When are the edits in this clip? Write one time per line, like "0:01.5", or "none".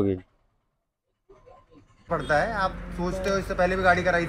0:02.1